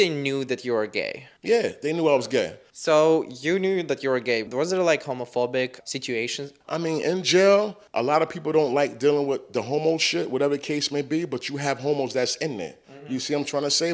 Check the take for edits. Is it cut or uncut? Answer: uncut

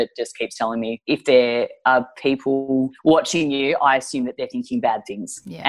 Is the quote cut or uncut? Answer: cut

